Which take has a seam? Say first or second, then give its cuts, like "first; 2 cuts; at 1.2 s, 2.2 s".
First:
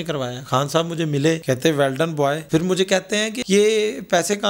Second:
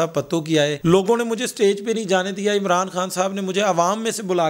first; 3 cuts; at 1.4 s, 2.4 s, 3.3 s